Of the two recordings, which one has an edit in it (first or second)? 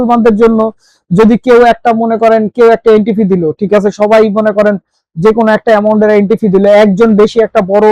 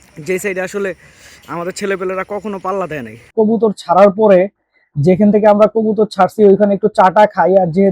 second